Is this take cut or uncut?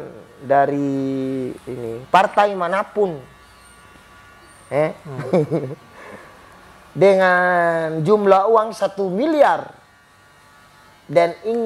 uncut